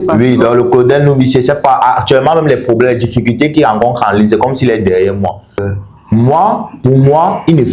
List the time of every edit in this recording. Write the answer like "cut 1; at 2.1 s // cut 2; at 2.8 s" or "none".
cut 1; at 5.6 s